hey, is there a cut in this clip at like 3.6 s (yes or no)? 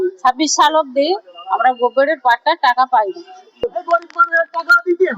yes